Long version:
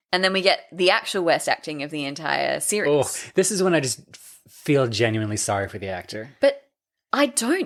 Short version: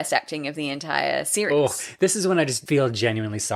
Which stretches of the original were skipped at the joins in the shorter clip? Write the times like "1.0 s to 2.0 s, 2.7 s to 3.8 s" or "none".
3.9 s to 4.6 s